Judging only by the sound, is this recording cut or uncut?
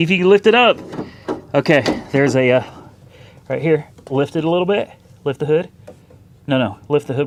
uncut